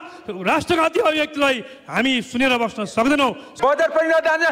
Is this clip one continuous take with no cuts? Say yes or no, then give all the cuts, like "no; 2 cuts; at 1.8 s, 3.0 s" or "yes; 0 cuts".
no; 1 cut; at 3.5 s